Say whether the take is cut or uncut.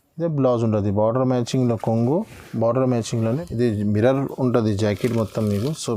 cut